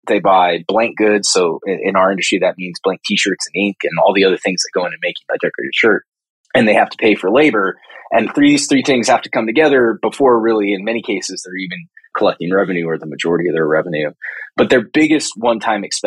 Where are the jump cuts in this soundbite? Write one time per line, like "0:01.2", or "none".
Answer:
0:05.3